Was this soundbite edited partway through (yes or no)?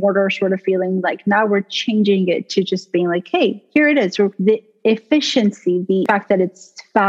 yes